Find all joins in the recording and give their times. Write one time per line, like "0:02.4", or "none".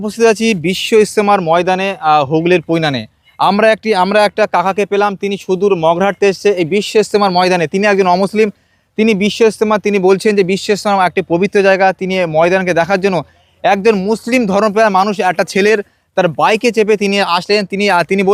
none